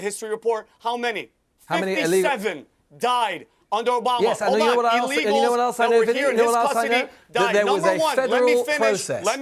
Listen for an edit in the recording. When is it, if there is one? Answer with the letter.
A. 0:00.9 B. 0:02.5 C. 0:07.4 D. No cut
D